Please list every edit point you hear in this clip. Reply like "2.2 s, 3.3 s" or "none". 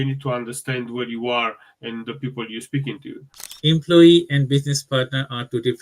3.5 s

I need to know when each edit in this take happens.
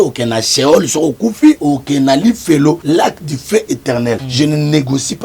1.6 s, 2.8 s, 4.3 s

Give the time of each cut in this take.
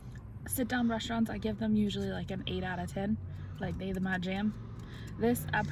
none

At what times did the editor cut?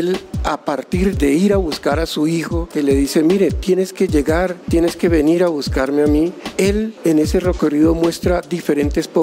1.1 s, 2.7 s, 4.6 s, 6.8 s

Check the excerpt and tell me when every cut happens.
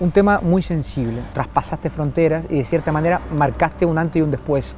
1.3 s

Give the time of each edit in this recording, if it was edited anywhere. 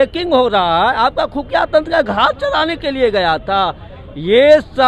none

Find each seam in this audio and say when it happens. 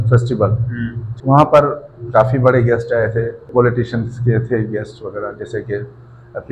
1.1 s, 3.5 s

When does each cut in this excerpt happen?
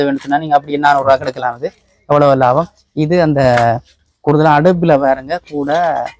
none

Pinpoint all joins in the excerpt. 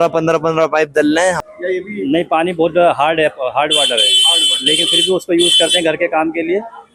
1.4 s

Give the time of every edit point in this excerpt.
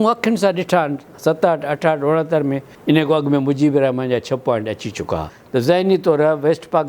2.7 s, 5.3 s

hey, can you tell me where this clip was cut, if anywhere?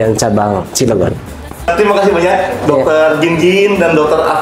none

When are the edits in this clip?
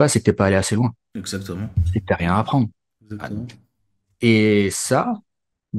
none

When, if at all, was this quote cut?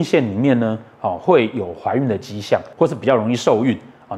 2.7 s

